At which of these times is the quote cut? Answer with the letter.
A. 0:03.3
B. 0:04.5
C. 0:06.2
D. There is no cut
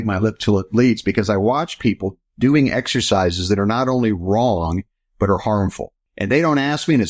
D